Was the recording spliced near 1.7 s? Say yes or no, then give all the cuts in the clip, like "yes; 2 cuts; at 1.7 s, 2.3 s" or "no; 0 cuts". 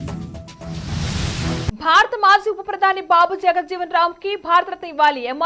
yes; 1 cut; at 1.7 s